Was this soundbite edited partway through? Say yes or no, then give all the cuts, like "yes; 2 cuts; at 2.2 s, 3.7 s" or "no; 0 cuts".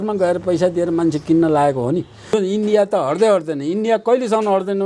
yes; 1 cut; at 2.3 s